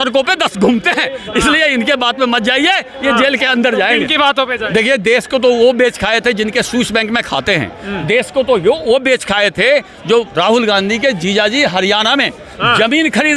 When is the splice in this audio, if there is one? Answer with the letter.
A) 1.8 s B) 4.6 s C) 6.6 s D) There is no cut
B